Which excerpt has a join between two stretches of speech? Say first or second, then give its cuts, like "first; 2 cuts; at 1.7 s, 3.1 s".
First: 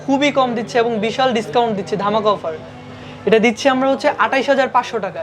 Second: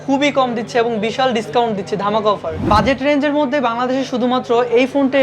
second; 1 cut; at 2.7 s